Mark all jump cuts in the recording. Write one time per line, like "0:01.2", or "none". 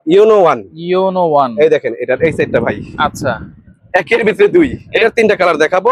0:04.8